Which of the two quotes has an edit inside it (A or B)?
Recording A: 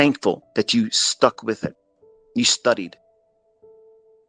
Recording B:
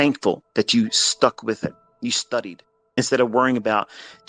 B